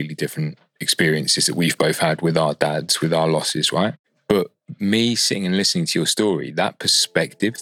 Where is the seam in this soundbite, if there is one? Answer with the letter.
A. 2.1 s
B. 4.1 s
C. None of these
B